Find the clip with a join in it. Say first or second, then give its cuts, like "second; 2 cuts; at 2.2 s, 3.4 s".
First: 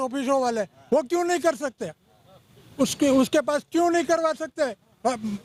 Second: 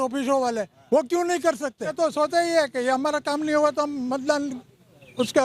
second; 1 cut; at 1.9 s